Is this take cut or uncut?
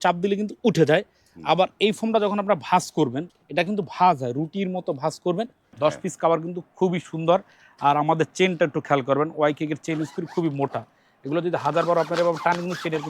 cut